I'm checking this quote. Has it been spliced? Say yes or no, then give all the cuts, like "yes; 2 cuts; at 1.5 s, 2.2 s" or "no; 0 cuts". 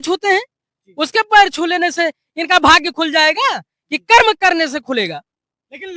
no; 0 cuts